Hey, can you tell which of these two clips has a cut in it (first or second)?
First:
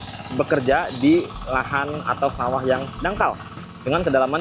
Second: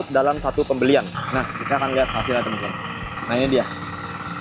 second